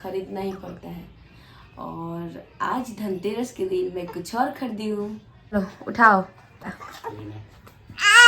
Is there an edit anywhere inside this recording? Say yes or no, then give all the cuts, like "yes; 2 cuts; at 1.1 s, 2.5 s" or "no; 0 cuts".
yes; 2 cuts; at 5.5 s, 6.8 s